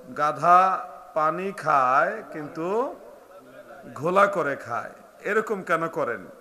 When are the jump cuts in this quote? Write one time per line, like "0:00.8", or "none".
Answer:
none